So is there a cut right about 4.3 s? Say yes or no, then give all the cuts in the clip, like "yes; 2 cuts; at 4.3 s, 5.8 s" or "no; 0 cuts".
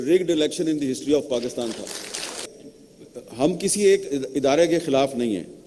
no; 1 cut; at 2.5 s